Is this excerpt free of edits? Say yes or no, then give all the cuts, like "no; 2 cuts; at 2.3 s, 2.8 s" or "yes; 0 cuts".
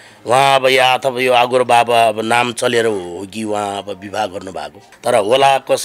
no; 1 cut; at 4.8 s